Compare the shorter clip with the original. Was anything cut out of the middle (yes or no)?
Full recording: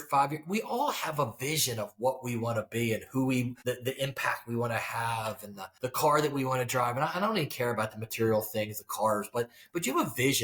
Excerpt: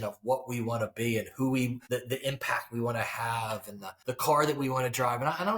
no